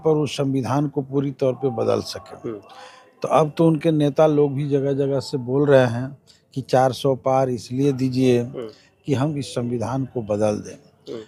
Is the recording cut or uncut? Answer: uncut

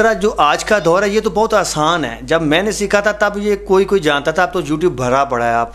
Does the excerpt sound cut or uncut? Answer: uncut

